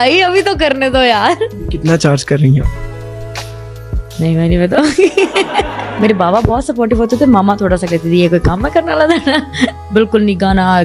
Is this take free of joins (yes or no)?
no